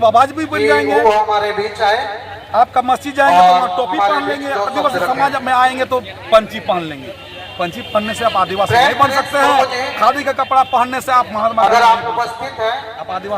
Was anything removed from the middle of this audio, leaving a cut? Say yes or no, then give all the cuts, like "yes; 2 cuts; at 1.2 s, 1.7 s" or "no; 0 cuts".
no; 0 cuts